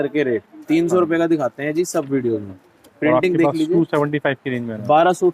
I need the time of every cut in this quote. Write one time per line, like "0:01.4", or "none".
none